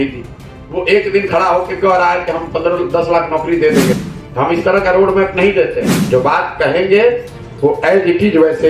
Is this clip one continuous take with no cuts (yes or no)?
no